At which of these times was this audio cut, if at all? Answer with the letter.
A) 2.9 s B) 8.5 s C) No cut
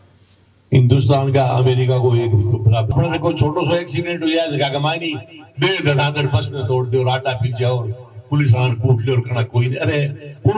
A